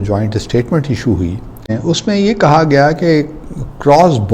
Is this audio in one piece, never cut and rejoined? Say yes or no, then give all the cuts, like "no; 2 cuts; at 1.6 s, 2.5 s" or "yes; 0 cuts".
no; 1 cut; at 1.7 s